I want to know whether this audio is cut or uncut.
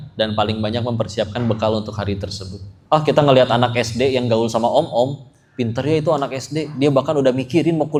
uncut